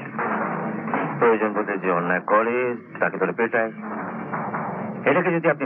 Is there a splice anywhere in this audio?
no; 0 cuts

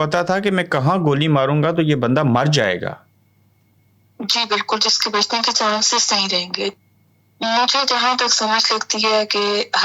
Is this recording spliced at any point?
yes; 1 cut; at 6.7 s

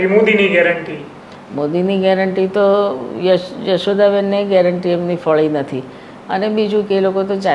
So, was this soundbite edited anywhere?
no; 0 cuts

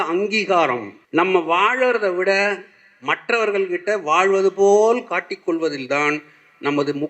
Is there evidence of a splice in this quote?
yes; 1 cut; at 0.9 s

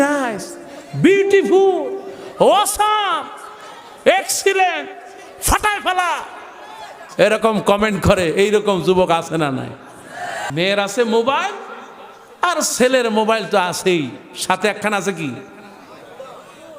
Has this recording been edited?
yes; 1 cut; at 10.4 s

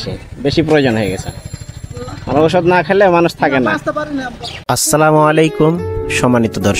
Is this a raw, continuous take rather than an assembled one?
no; 1 cut; at 4.7 s

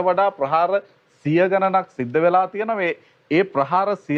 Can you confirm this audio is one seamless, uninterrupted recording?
yes; 0 cuts

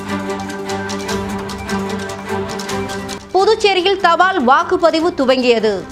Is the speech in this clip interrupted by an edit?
no; 0 cuts

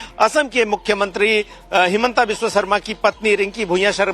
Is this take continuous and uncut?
yes; 0 cuts

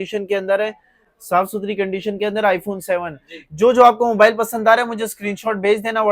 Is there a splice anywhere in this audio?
no; 0 cuts

